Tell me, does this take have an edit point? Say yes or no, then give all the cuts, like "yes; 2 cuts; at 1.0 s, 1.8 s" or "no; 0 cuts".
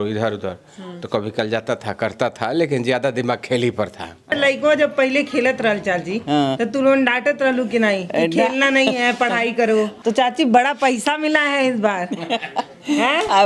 yes; 2 cuts; at 4.3 s, 9.9 s